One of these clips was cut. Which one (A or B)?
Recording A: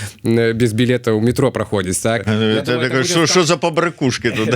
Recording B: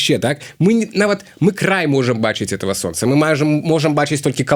A